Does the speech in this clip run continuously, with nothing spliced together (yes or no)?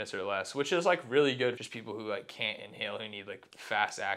no